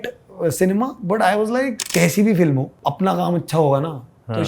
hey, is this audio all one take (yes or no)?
no